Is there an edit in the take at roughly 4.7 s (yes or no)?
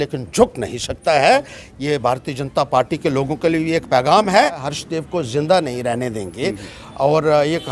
yes